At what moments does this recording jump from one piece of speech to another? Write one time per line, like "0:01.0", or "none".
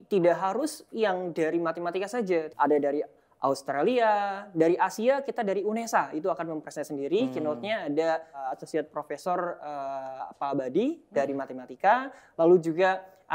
0:02.5
0:08.4